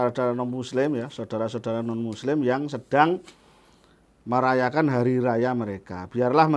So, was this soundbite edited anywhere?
no; 0 cuts

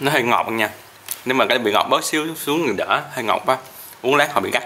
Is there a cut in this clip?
no; 0 cuts

